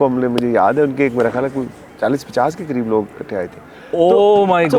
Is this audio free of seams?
yes; 0 cuts

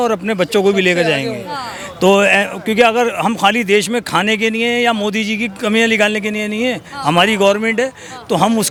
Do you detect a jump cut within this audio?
no; 0 cuts

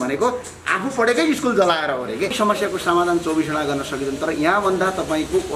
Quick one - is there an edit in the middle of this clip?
yes; 1 cut; at 2.3 s

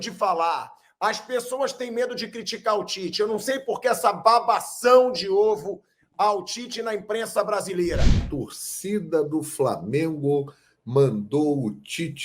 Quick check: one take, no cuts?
no; 1 cut; at 8.3 s

